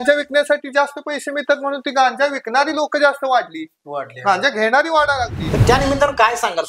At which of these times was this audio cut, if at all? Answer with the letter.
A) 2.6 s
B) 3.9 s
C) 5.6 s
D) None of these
C